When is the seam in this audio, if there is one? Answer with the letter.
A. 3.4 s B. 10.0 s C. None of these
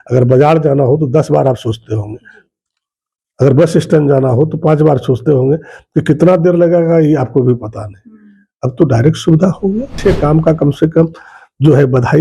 B